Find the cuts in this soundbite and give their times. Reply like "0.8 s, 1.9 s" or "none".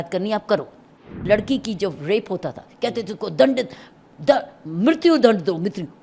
1.1 s